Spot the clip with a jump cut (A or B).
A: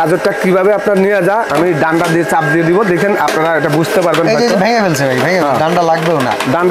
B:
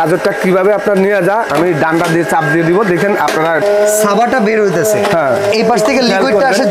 B